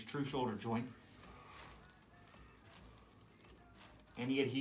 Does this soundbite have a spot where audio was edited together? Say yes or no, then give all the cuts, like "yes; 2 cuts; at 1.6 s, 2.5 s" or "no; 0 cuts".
no; 0 cuts